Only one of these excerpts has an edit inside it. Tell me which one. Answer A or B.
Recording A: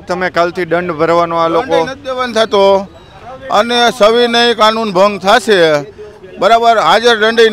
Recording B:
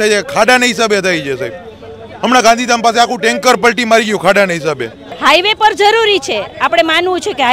B